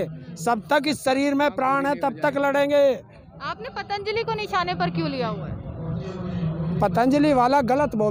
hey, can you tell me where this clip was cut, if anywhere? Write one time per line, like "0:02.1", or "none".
none